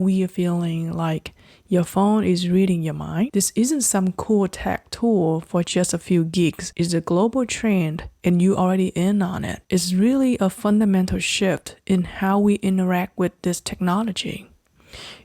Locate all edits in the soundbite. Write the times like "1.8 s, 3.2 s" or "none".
3.3 s, 6.6 s, 9.5 s